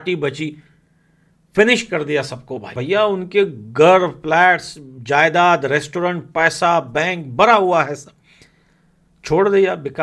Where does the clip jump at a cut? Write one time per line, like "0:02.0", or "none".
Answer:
0:02.8